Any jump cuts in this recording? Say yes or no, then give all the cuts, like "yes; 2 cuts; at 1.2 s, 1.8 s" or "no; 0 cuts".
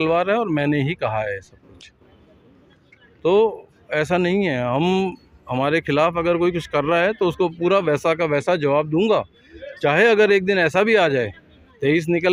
no; 0 cuts